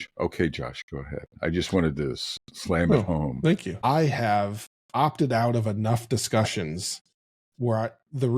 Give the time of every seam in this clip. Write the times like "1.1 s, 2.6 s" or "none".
3.8 s